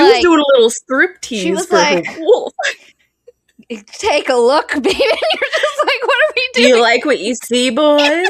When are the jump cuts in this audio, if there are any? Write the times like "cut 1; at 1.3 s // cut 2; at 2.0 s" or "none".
none